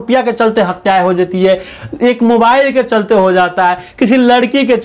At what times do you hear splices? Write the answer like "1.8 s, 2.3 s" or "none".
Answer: none